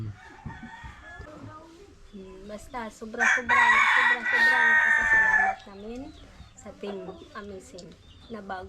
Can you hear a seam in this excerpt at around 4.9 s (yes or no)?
no